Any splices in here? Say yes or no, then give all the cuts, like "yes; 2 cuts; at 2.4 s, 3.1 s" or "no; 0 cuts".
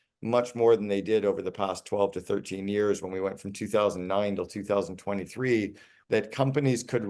yes; 1 cut; at 6.0 s